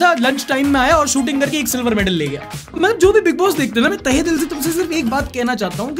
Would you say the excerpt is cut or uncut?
cut